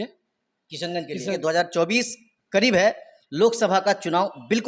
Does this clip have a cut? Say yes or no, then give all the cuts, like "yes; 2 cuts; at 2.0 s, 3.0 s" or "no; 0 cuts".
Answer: yes; 1 cut; at 1.4 s